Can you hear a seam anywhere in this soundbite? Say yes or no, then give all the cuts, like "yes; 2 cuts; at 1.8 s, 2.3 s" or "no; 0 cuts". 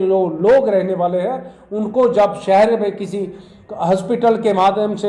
no; 0 cuts